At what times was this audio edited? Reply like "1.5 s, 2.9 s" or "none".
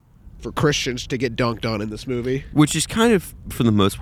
none